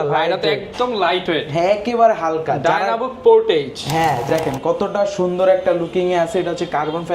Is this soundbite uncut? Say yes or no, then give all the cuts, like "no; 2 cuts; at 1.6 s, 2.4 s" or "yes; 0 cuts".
no; 1 cut; at 4.2 s